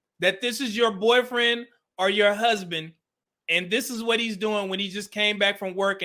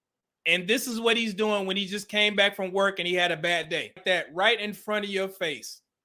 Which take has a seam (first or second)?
second